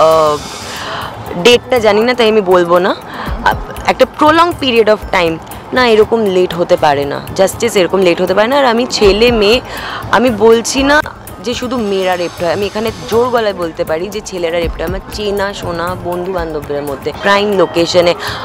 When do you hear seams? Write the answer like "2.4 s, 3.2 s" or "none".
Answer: 17.2 s